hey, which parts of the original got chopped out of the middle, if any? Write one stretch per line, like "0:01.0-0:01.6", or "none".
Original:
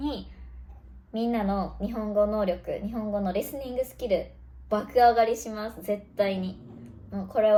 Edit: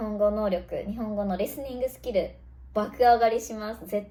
none